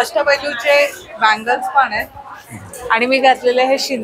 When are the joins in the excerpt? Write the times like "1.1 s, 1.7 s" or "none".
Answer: none